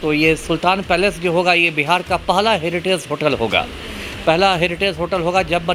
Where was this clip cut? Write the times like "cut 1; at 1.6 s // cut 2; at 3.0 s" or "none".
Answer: none